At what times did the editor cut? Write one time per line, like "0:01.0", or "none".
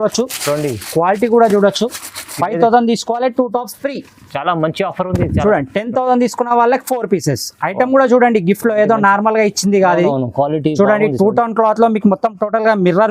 none